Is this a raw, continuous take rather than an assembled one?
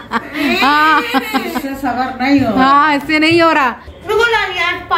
no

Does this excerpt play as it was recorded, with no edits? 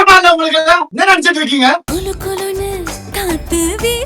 no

